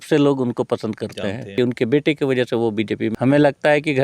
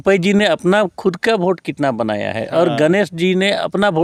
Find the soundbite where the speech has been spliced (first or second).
first